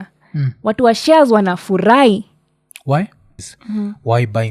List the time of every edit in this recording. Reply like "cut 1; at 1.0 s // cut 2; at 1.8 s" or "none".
cut 1; at 3.5 s